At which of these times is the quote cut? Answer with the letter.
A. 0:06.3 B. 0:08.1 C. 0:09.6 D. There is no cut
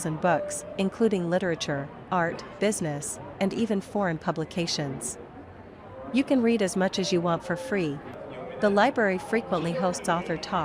B